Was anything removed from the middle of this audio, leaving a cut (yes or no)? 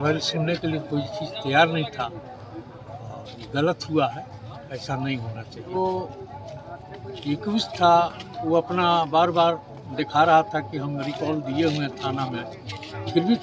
yes